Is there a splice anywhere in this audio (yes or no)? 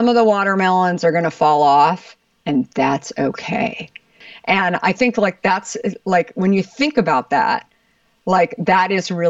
yes